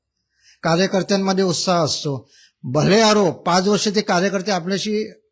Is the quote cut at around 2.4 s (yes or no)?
no